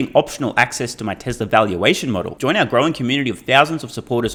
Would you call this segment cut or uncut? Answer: uncut